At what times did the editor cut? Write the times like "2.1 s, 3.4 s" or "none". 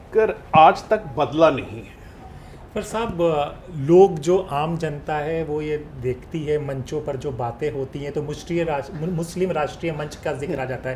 none

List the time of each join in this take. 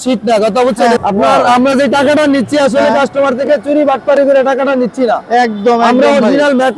1.0 s

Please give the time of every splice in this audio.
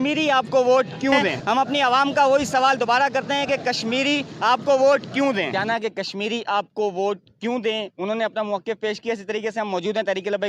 1.3 s, 5.5 s

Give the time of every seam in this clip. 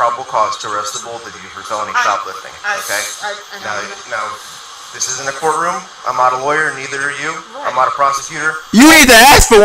none

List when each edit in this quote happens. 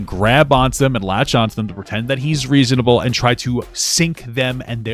none

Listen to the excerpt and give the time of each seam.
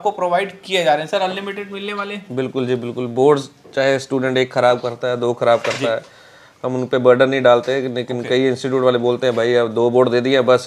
none

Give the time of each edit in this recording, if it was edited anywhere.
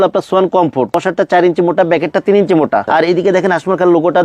1.0 s, 2.8 s

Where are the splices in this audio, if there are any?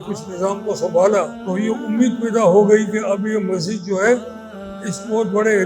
1.4 s

